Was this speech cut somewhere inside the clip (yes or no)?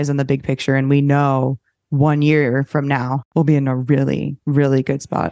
yes